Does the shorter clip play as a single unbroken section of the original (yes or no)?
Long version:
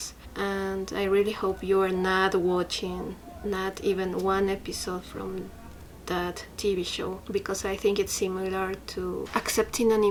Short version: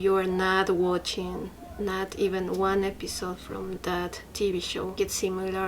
no